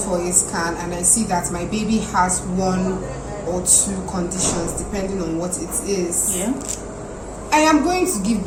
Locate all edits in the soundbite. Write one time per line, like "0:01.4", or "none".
none